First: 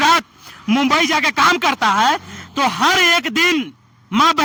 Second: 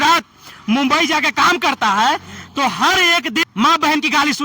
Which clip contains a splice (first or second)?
second